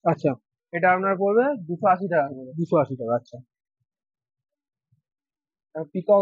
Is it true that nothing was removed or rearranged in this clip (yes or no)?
yes